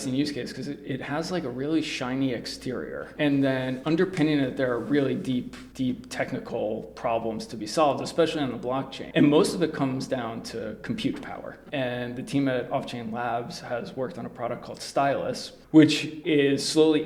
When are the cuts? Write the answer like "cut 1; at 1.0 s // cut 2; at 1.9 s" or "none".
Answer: cut 1; at 5.6 s // cut 2; at 9.0 s // cut 3; at 11.5 s // cut 4; at 16.1 s